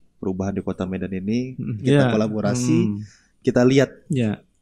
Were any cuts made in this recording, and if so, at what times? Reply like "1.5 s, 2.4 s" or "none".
1.8 s